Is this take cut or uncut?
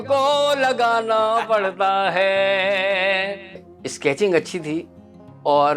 cut